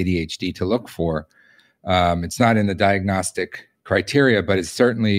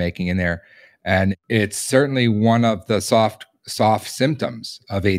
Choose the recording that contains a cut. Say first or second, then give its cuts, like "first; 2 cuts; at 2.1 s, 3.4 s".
second; 1 cut; at 1.4 s